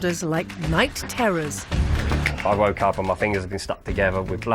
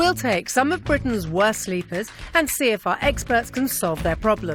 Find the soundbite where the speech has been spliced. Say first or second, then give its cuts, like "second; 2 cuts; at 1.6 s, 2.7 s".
first; 1 cut; at 1.9 s